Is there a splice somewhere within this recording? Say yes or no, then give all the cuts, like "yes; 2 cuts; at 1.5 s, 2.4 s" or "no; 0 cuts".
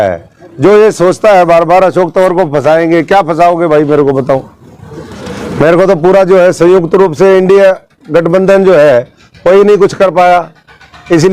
no; 0 cuts